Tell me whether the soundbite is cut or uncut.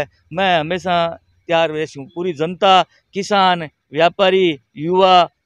uncut